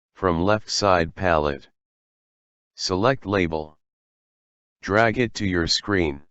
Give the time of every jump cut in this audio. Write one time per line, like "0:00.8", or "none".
0:01.1